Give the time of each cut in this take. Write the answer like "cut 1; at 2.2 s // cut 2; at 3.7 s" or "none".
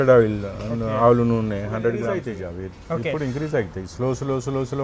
cut 1; at 2.3 s